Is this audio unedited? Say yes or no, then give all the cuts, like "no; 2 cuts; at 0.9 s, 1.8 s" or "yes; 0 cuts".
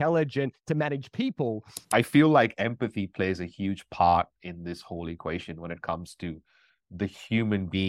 no; 1 cut; at 1.7 s